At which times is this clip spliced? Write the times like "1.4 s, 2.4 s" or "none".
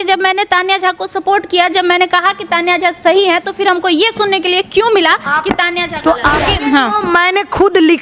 6.4 s